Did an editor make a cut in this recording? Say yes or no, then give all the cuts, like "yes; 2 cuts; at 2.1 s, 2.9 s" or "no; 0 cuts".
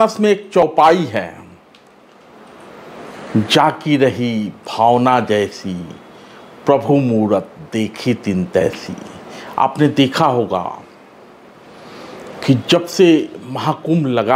no; 0 cuts